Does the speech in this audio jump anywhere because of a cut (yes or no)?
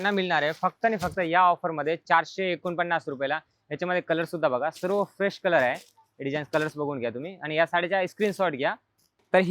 no